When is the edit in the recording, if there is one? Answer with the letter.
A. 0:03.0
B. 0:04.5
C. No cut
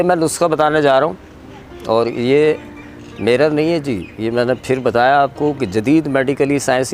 C